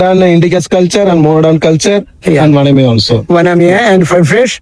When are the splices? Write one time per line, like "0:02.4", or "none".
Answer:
none